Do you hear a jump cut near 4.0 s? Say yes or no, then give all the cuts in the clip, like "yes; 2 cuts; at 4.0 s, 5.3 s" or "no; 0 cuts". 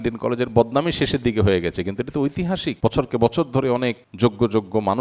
yes; 2 cuts; at 2.8 s, 4.0 s